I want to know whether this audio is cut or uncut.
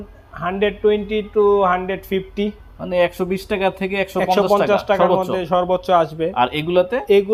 uncut